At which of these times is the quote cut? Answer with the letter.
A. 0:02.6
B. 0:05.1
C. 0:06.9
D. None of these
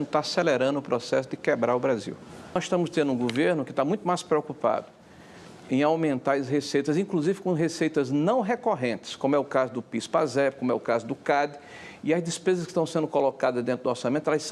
A